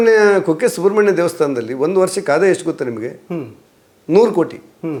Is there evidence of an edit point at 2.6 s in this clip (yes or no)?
no